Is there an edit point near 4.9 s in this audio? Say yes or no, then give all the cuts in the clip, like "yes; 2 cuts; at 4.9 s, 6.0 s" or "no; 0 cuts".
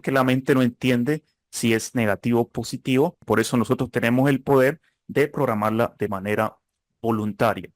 no; 1 cut; at 3.2 s